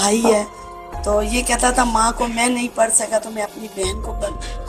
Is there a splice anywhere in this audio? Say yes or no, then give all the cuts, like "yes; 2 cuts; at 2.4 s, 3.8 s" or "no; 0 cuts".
no; 0 cuts